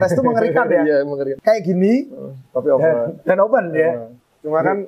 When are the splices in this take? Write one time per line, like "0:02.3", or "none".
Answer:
0:01.3